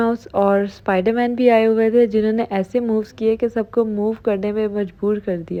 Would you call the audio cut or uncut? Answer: uncut